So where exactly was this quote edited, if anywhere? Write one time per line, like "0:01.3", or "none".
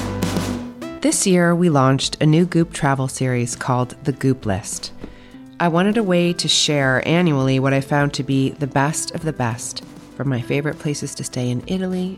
0:00.9